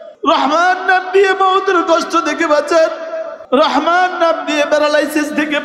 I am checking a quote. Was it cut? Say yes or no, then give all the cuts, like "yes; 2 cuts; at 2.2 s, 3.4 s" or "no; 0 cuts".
no; 0 cuts